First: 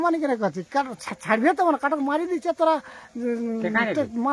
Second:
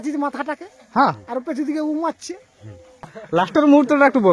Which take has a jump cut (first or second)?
second